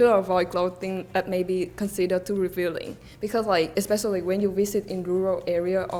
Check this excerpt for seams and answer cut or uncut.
uncut